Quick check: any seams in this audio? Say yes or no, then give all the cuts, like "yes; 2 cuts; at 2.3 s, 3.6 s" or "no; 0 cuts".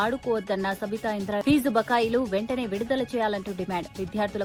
no; 0 cuts